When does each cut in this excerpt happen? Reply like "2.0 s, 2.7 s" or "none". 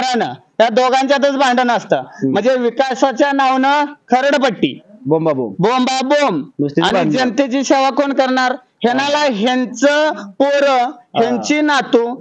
none

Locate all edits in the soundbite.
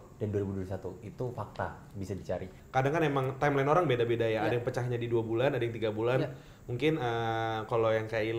2.5 s

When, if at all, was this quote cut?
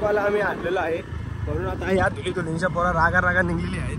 none

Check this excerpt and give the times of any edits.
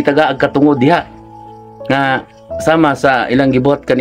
none

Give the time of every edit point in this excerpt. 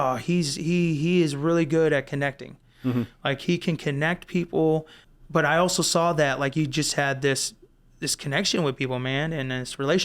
5.0 s

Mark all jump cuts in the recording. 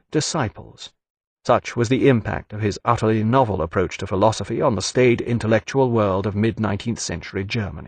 none

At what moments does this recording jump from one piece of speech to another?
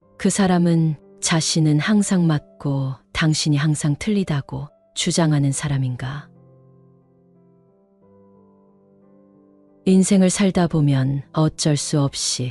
6.3 s, 9.8 s

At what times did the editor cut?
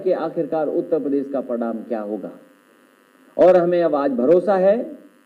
none

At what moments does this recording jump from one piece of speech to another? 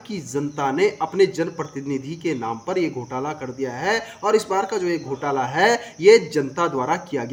none

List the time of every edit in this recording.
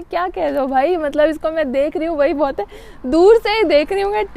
none

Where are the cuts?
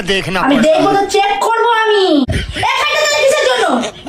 2.3 s

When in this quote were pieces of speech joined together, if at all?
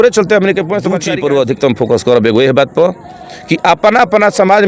1.0 s

